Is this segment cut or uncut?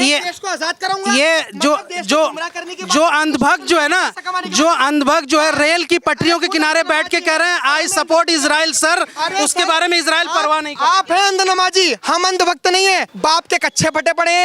cut